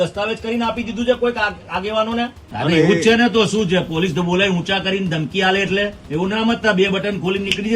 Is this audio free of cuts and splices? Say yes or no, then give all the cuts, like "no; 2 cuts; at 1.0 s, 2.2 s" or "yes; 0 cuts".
no; 2 cuts; at 2.5 s, 6.0 s